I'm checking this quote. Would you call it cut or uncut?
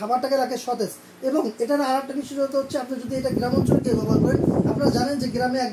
uncut